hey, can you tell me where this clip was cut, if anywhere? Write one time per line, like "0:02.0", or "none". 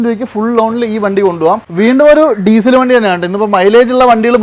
0:01.7